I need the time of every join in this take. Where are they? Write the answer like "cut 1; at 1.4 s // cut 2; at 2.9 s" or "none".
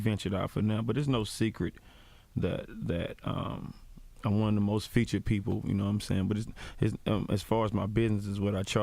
cut 1; at 5.5 s